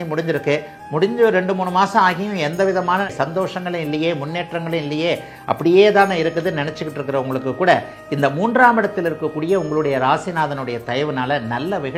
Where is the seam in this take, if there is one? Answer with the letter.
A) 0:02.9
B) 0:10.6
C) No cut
C